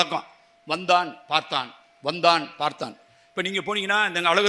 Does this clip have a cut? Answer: no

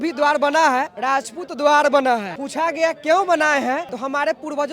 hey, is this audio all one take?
no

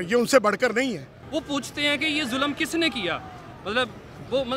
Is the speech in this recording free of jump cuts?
no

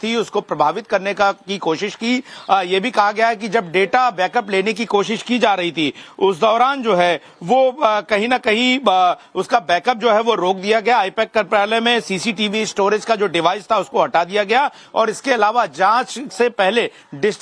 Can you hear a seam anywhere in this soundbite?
yes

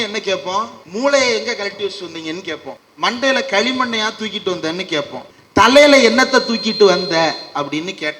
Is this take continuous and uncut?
no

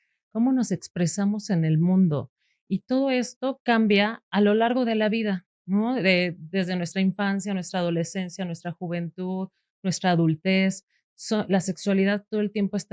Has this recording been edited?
no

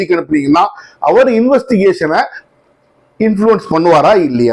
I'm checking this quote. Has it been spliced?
no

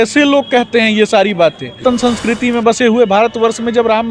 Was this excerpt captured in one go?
no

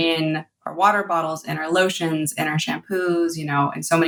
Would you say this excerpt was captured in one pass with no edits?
yes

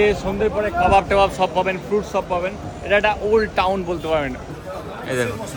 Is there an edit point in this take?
yes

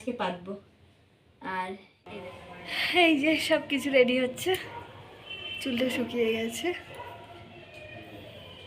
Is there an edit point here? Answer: yes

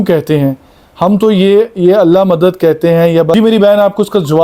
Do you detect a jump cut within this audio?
yes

